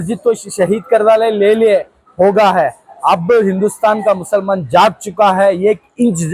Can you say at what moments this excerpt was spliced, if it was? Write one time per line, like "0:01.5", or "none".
none